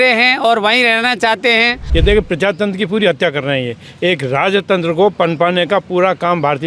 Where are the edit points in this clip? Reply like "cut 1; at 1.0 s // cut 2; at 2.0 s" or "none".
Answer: cut 1; at 1.8 s

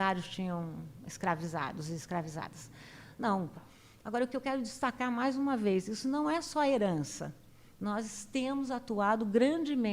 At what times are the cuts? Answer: cut 1; at 3.6 s

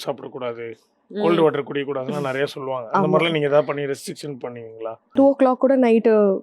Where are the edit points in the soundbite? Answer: cut 1; at 5.0 s

